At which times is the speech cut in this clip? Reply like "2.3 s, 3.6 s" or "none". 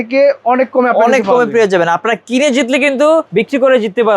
3.3 s